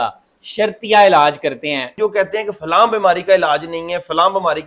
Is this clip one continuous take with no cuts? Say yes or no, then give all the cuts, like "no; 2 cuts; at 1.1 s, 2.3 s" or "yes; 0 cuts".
no; 1 cut; at 1.9 s